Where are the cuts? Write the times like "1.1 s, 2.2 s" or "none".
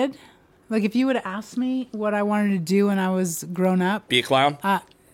none